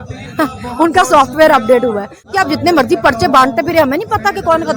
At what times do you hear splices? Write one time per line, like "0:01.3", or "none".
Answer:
0:02.3

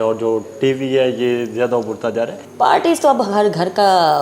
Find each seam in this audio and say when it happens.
0:02.4

